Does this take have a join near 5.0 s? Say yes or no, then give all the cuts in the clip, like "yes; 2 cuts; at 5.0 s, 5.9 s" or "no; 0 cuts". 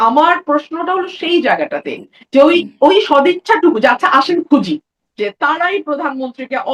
yes; 1 cut; at 5.0 s